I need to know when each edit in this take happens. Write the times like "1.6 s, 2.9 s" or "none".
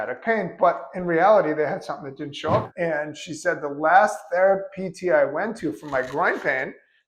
2.7 s